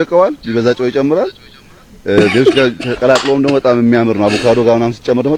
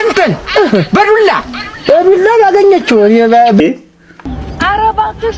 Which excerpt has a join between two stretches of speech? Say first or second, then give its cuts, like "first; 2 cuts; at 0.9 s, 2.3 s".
second; 1 cut; at 3.6 s